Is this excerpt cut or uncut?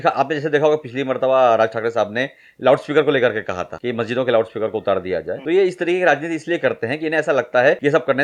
uncut